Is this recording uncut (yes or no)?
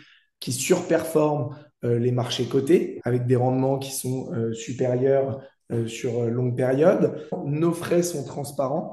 no